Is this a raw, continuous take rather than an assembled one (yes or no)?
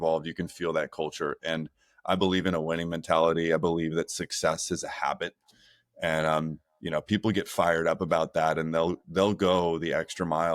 yes